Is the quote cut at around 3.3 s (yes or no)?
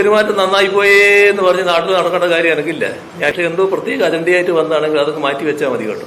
yes